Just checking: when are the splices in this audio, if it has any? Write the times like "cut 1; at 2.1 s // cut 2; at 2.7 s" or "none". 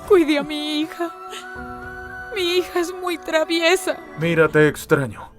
cut 1; at 4.1 s